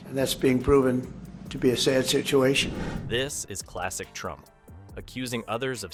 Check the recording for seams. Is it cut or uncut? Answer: uncut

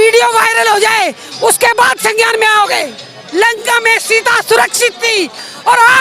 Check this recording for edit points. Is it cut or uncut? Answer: cut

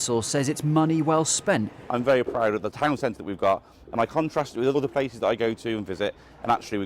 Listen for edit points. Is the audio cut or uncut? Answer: cut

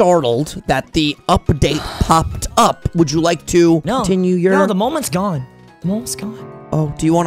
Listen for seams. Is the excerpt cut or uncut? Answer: cut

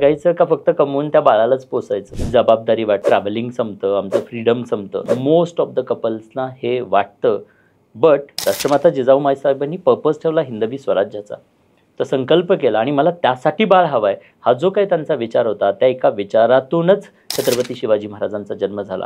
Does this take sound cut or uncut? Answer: cut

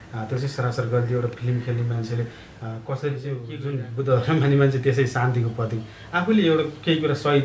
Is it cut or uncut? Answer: cut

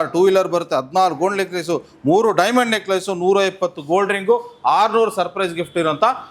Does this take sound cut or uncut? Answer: uncut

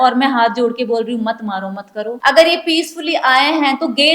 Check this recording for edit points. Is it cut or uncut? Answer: cut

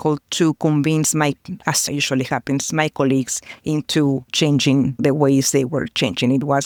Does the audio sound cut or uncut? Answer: uncut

